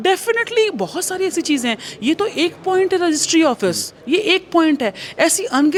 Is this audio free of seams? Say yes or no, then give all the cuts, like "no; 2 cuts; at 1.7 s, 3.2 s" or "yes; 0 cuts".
yes; 0 cuts